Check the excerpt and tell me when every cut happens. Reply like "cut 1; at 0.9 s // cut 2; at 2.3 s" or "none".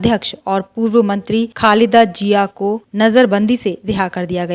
cut 1; at 1.5 s // cut 2; at 2.8 s